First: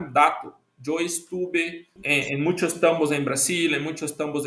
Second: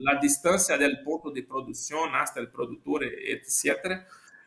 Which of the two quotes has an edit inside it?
first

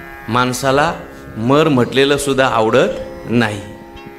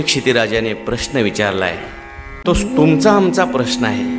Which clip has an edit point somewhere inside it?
second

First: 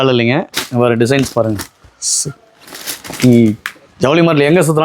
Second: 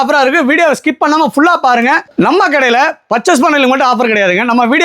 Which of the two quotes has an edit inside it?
second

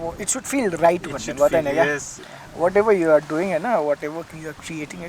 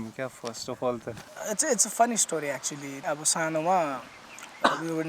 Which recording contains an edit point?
second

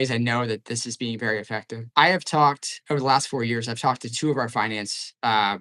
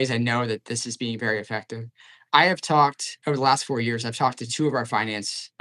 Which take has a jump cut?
first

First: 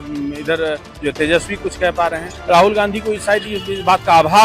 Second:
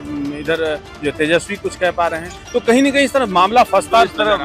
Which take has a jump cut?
first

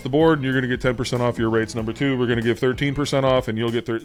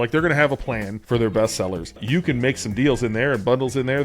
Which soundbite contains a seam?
second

